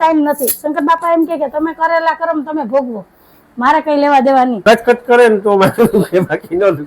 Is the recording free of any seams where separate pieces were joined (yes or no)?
no